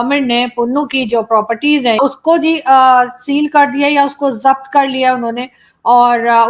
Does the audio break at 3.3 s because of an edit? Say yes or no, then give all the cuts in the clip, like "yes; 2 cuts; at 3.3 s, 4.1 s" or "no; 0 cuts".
no; 1 cut; at 2.0 s